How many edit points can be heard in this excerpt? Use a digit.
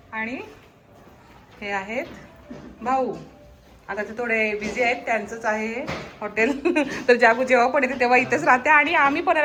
0